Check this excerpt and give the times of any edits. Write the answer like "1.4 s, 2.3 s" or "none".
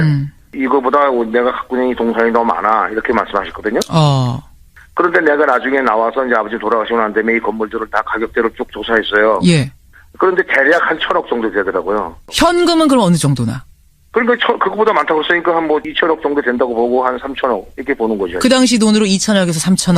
8.3 s

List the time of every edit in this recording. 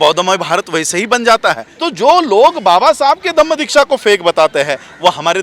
1.7 s

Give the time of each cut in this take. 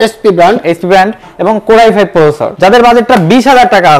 2.5 s

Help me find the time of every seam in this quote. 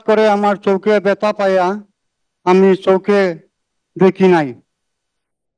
none

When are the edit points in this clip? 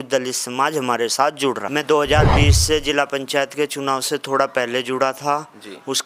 1.6 s

